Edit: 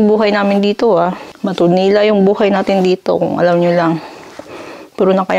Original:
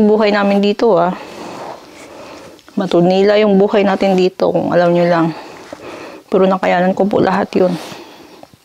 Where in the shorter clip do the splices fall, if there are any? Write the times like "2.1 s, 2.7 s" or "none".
1.3 s